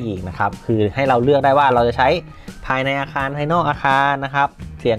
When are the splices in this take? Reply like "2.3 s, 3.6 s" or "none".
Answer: none